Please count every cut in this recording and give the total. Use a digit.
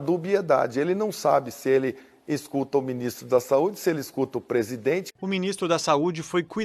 1